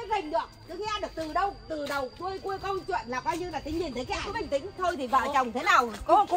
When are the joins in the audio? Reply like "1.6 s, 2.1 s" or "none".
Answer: 4.3 s